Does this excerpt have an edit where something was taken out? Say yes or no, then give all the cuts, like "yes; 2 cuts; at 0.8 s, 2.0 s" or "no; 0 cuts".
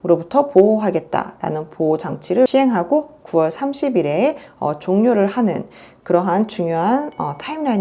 yes; 1 cut; at 2.5 s